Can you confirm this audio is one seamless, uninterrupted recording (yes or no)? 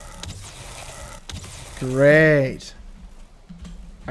yes